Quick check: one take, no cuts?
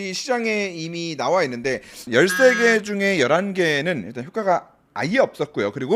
no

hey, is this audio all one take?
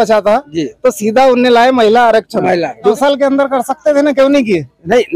no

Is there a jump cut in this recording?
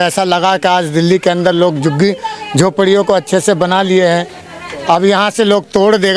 no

